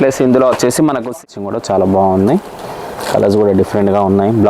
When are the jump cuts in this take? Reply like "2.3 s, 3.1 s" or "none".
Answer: 1.4 s